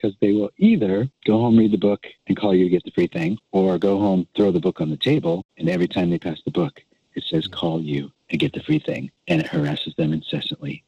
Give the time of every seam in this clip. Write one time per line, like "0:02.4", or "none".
0:01.1
0:02.1
0:03.4
0:05.5
0:08.2
0:09.1